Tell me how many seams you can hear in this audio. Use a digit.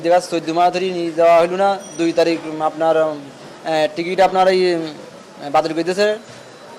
0